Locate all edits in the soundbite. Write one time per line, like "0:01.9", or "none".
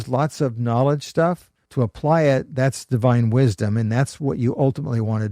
0:01.5